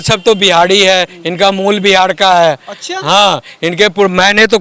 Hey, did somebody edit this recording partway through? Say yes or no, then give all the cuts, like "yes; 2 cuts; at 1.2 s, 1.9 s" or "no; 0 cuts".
no; 0 cuts